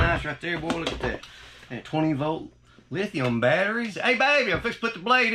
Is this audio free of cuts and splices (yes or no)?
no